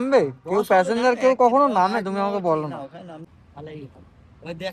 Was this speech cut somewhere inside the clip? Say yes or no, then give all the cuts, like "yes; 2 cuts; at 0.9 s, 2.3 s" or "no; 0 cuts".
yes; 1 cut; at 3.2 s